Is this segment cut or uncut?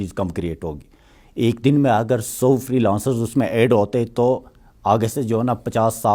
uncut